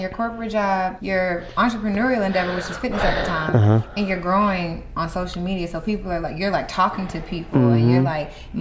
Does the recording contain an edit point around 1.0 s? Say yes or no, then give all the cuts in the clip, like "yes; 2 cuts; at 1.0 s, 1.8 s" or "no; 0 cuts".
yes; 1 cut; at 1.0 s